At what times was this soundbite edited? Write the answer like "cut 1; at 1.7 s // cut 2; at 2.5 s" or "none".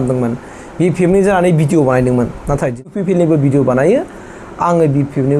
cut 1; at 2.9 s